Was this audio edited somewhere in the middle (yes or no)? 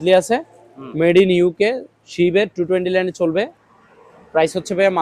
no